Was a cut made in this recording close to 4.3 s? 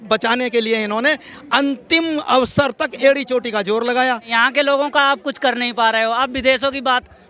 yes; 1 cut; at 4.3 s

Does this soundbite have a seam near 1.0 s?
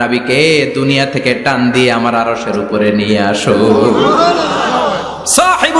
no; 0 cuts

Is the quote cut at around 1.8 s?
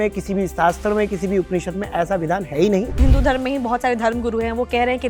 no; 1 cut; at 3.0 s

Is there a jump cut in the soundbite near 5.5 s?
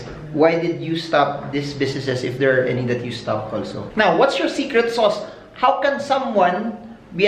no; 1 cut; at 3.8 s

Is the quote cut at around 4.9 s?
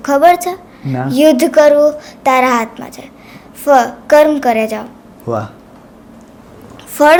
no; 0 cuts

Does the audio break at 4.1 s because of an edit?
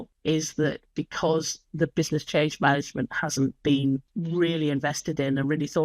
yes; 1 cut; at 4.1 s

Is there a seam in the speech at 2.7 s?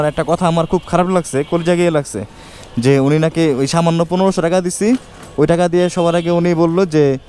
no; 0 cuts

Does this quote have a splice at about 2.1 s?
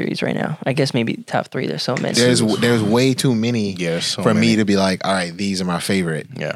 yes; 1 cut; at 2.1 s

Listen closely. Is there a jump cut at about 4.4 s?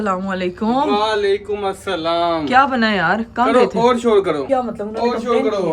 yes; 1 cut; at 4.4 s

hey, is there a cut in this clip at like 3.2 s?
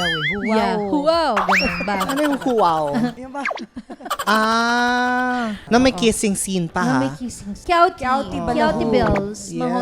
yes; 3 cuts; at 3.2 s, 5.6 s, 7.5 s

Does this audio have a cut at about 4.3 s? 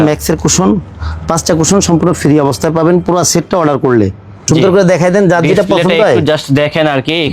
yes; 1 cut; at 4.3 s

